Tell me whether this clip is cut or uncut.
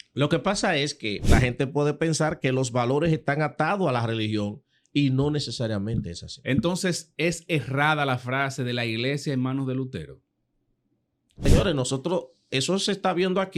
cut